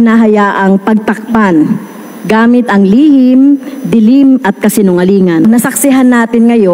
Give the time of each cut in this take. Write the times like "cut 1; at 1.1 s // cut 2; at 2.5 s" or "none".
cut 1; at 5.4 s